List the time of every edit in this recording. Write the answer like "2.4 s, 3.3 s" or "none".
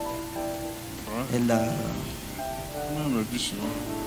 none